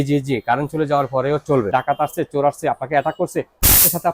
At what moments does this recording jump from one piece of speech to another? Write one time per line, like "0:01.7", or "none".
0:01.7